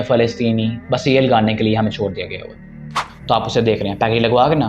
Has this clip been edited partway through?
yes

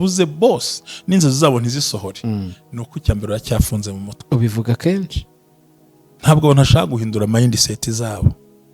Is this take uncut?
yes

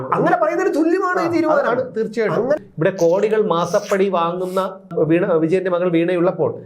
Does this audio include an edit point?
yes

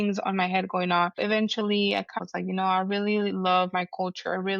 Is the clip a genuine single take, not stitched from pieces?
no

